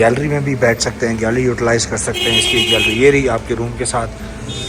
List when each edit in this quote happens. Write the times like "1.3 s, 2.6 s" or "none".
none